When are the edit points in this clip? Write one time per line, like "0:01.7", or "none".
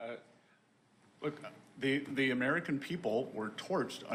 none